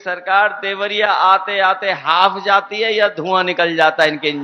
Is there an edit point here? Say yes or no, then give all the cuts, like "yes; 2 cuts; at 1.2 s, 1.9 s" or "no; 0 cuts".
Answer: no; 0 cuts